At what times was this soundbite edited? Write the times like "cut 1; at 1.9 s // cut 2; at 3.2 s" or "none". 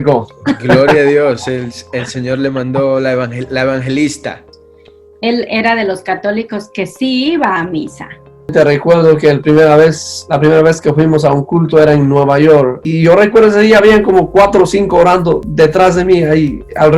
cut 1; at 4.6 s // cut 2; at 8.5 s // cut 3; at 12.8 s

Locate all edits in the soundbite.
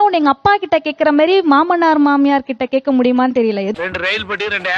cut 1; at 3.8 s

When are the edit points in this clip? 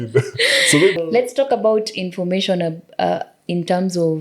cut 1; at 1.0 s

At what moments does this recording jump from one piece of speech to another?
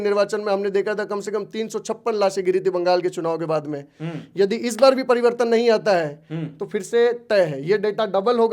none

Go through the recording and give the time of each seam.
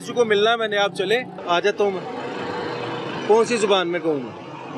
cut 1; at 1.4 s

